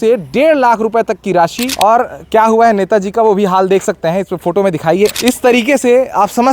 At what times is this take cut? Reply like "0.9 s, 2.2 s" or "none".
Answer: 1.7 s

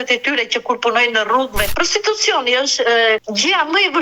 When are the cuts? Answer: 1.7 s, 3.2 s

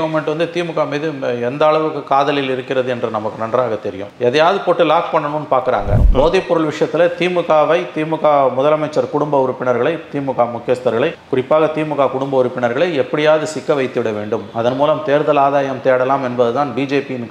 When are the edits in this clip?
5.9 s

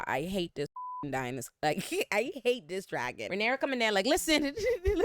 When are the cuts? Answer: 3.3 s

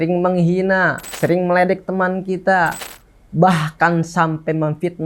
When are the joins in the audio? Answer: 1.0 s

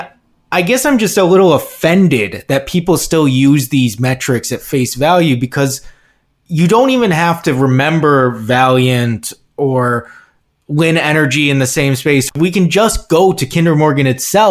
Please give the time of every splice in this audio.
12.3 s

